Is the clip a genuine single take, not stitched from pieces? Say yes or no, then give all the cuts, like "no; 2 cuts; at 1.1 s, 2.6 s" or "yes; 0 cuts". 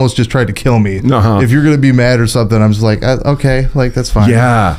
yes; 0 cuts